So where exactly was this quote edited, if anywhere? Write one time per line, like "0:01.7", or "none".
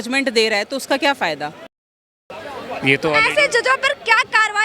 0:02.0